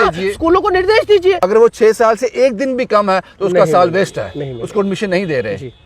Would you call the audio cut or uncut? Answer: cut